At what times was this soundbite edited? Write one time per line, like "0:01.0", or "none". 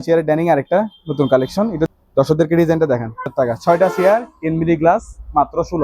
0:01.9
0:03.3